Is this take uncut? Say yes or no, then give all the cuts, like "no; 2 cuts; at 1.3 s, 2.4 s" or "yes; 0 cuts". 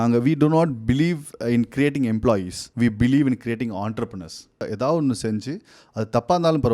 no; 2 cuts; at 2.6 s, 4.6 s